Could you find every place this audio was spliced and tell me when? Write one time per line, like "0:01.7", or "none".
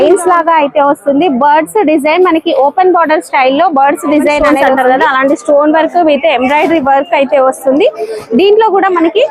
0:04.4